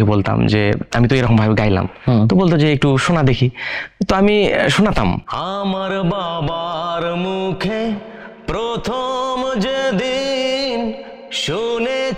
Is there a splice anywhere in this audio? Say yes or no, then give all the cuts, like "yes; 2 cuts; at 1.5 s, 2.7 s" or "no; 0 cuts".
yes; 1 cut; at 5.2 s